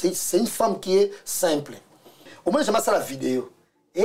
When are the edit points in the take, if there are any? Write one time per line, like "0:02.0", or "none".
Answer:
0:02.3